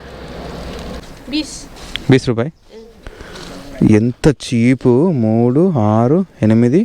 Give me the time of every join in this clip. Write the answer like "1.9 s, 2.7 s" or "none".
1.0 s